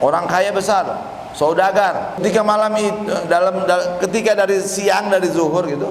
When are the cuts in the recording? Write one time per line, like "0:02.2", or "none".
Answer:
0:02.2